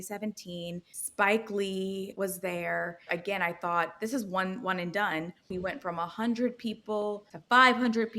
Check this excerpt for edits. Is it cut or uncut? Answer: cut